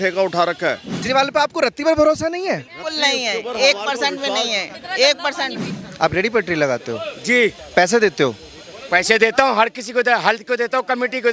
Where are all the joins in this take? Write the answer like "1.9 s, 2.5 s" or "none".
0.9 s, 5.6 s